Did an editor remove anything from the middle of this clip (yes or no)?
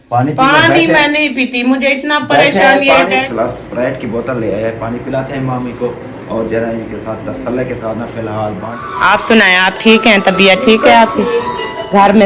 yes